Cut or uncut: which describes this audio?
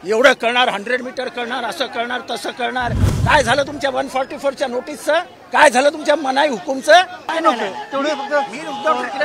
cut